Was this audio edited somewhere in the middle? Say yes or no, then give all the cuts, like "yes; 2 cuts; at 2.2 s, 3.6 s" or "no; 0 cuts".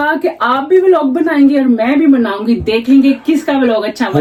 no; 0 cuts